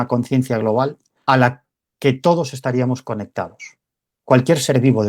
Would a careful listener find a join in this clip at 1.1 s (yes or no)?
yes